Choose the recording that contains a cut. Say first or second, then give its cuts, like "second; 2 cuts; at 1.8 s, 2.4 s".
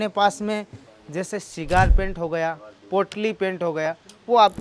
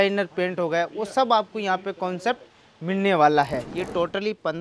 second; 1 cut; at 3.7 s